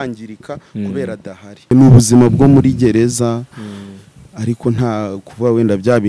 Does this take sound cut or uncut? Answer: cut